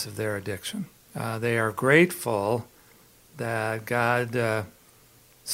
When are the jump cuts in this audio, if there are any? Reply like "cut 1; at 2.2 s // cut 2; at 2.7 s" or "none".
cut 1; at 1.0 s